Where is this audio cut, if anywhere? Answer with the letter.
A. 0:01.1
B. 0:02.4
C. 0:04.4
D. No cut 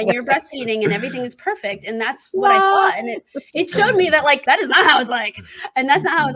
C